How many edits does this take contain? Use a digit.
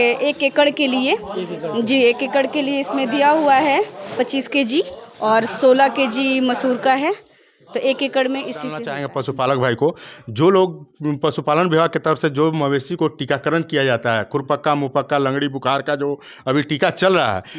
1